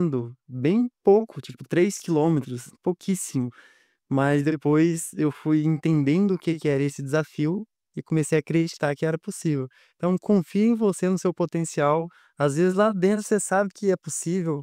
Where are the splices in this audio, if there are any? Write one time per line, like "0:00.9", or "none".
none